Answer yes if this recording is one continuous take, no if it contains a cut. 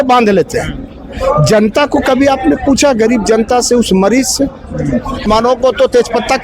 no